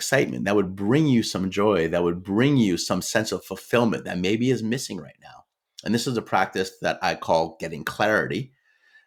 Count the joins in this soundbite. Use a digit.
0